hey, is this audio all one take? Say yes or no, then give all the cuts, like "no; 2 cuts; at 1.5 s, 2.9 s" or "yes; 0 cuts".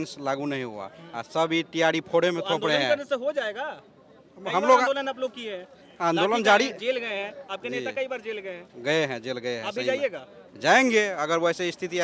yes; 0 cuts